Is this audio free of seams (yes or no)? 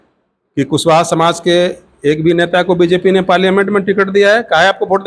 yes